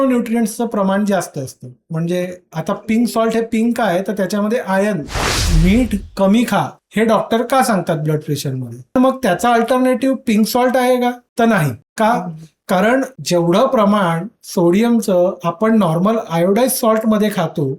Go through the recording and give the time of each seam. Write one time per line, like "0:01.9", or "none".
0:05.1